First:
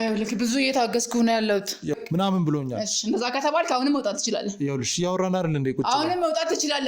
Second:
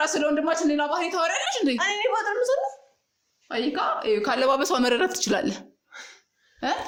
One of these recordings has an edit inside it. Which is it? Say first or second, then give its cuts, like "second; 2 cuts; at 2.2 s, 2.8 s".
first; 1 cut; at 2.0 s